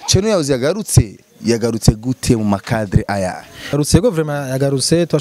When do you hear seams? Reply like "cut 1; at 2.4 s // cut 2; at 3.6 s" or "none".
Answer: cut 1; at 3.7 s